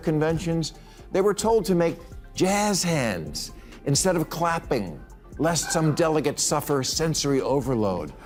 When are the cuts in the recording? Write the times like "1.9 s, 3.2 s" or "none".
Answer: none